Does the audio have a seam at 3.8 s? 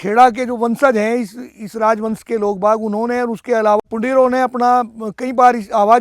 yes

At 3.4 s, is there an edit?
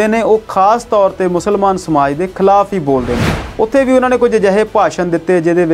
yes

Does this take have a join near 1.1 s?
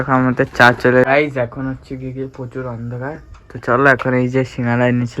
yes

